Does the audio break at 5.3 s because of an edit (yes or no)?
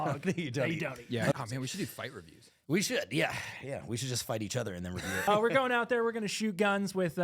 yes